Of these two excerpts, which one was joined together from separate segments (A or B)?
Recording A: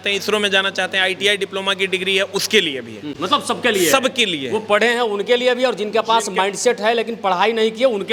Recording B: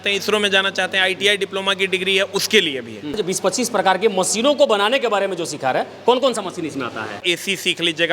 B